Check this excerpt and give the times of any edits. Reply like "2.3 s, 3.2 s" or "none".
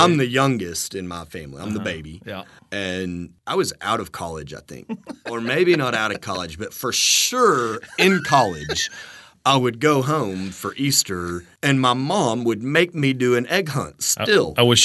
2.5 s, 3.3 s, 5.2 s, 11.5 s